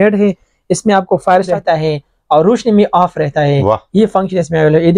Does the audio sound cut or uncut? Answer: cut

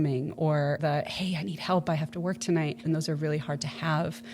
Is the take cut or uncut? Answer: cut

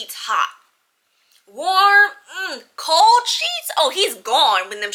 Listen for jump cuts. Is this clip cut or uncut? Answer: uncut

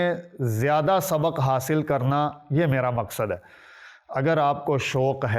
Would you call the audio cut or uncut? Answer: uncut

